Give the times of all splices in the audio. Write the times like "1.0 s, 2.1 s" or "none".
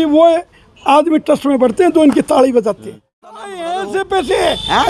3.6 s